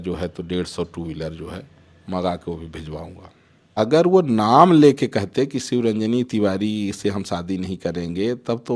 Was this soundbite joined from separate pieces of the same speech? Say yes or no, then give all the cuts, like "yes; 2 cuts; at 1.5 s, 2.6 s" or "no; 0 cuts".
yes; 1 cut; at 3.6 s